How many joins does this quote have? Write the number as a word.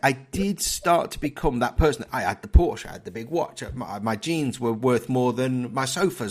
zero